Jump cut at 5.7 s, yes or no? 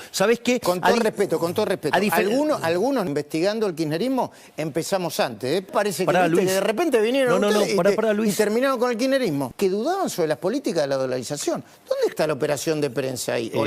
yes